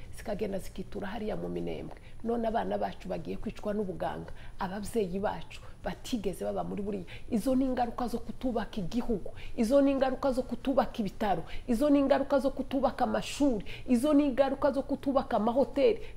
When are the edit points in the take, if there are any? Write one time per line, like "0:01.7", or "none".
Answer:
none